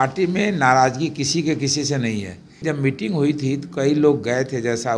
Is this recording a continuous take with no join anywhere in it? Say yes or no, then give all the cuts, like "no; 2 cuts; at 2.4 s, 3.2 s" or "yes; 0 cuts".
no; 1 cut; at 2.6 s